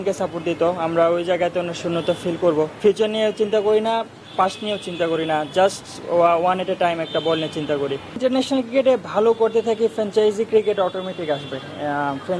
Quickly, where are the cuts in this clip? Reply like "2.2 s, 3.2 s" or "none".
2.7 s, 8.2 s

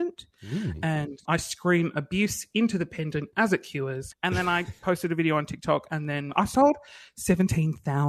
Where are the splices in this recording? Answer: 1.2 s, 4.0 s, 6.3 s

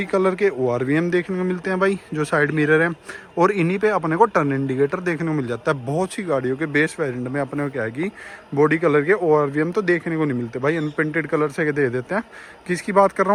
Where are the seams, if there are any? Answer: none

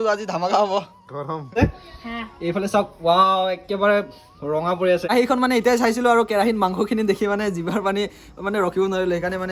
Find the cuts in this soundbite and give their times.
1.6 s, 5.1 s

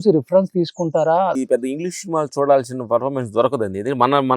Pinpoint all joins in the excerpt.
1.4 s

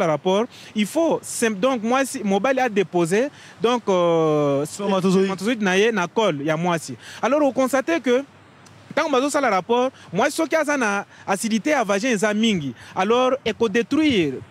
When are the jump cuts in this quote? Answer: none

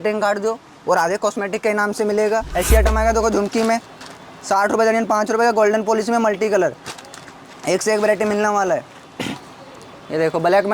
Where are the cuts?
2.5 s

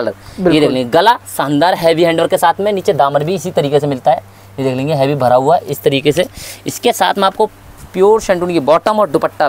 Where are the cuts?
none

